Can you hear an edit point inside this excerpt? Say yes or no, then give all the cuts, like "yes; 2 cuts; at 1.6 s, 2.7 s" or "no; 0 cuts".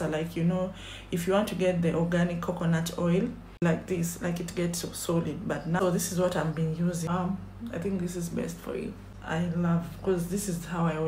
yes; 4 cuts; at 3.6 s, 5.8 s, 7.1 s, 9.1 s